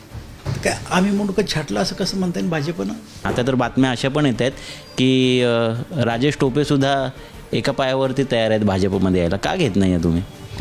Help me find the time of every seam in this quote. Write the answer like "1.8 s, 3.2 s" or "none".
3.3 s